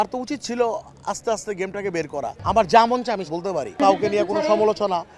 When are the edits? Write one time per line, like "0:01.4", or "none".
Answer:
0:02.3
0:03.8